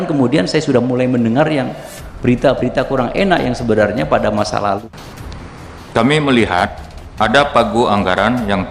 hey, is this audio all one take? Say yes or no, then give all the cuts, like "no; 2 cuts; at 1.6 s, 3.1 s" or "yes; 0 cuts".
no; 1 cut; at 4.9 s